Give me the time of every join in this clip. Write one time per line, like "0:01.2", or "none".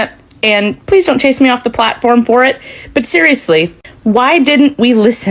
none

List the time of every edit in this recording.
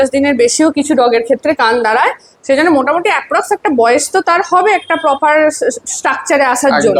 none

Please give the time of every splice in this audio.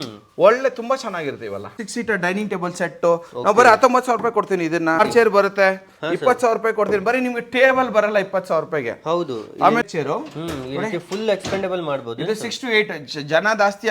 0:01.8
0:05.0
0:09.8

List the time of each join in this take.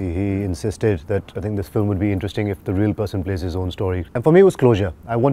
0:04.1

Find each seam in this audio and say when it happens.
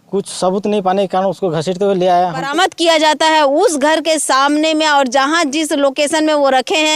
0:02.5

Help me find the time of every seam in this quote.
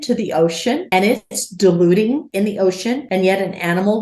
0:00.8
0:02.5

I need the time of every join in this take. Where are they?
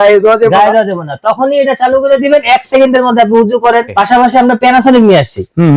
0:03.9

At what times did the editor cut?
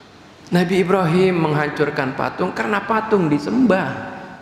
none

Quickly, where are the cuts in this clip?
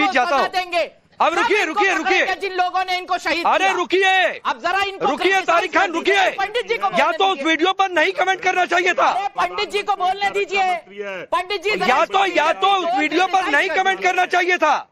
none

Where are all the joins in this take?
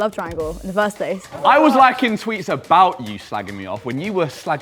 0:01.2

